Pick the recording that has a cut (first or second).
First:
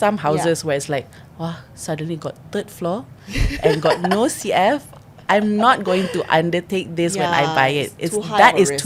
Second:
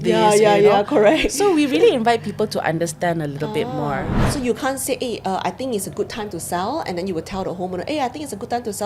second